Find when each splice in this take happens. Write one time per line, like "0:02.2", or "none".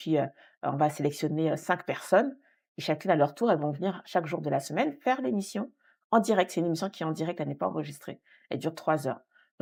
none